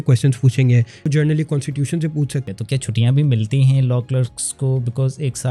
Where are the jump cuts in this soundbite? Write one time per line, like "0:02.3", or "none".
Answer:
0:01.1
0:02.5